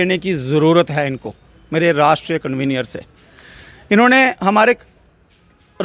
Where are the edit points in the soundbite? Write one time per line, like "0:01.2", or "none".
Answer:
none